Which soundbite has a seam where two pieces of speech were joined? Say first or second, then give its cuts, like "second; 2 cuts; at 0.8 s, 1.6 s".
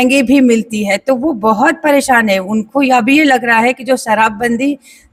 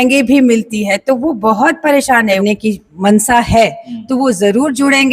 second; 1 cut; at 2.4 s